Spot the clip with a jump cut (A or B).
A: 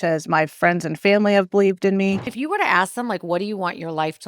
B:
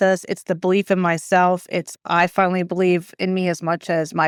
A